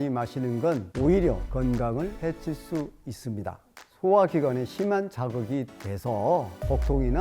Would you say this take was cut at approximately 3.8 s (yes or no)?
yes